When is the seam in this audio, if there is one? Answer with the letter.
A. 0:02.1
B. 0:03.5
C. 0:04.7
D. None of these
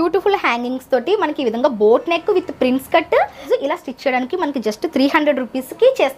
B